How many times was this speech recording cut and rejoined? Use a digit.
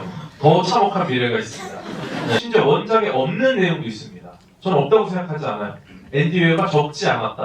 1